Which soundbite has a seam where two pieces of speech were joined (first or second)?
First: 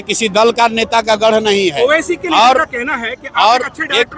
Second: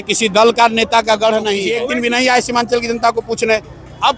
second